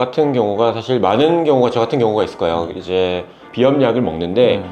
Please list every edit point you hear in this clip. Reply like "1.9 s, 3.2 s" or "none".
3.4 s